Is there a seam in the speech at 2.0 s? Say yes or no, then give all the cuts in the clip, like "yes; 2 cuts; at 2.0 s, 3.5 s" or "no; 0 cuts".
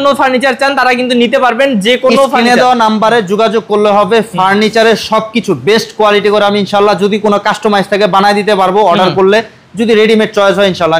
no; 0 cuts